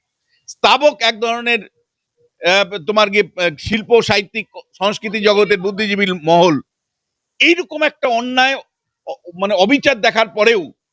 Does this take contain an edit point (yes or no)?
no